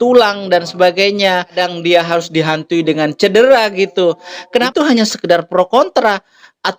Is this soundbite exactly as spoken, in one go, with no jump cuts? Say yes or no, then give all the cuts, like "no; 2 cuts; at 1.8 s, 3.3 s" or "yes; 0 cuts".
no; 2 cuts; at 1.5 s, 4.7 s